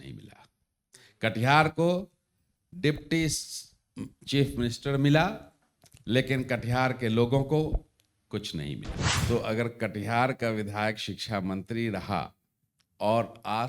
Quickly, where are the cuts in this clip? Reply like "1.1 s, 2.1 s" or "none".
9.0 s